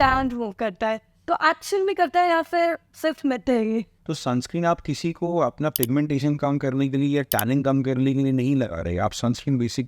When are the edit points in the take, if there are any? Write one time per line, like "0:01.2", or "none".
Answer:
0:04.0